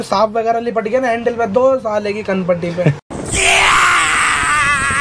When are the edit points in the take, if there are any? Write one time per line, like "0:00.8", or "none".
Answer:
none